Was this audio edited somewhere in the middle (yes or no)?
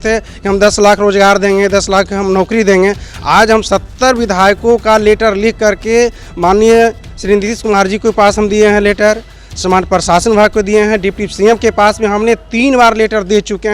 no